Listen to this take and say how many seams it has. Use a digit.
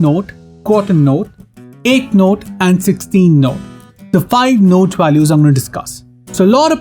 0